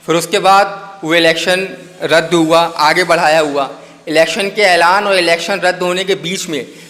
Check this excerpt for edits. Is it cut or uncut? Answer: uncut